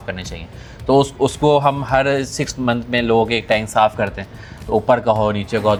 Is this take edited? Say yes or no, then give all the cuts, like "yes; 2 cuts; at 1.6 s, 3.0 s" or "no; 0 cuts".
no; 0 cuts